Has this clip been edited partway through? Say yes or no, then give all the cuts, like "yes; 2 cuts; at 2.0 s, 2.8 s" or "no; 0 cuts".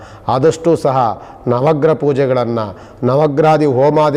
no; 0 cuts